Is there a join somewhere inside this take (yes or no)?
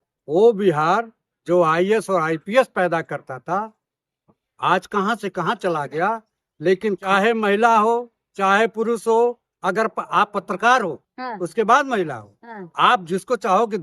yes